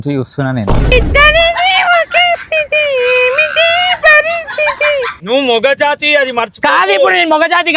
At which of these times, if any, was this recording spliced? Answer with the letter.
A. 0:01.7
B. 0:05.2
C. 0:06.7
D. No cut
B